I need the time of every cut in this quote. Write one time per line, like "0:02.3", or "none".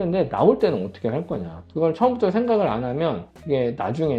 none